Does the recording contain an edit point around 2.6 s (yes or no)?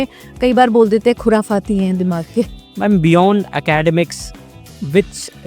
yes